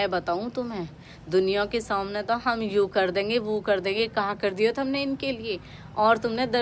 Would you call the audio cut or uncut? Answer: uncut